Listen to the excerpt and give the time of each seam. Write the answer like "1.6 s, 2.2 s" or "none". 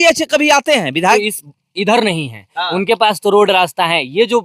1.1 s